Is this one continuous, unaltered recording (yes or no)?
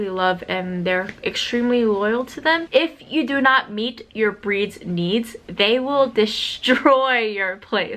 no